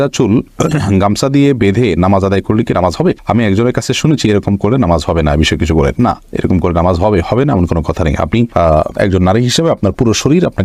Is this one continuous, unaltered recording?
yes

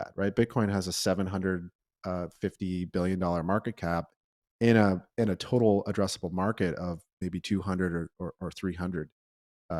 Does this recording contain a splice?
no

